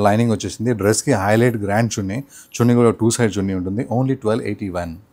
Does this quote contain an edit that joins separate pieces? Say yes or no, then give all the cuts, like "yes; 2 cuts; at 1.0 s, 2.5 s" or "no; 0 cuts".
no; 0 cuts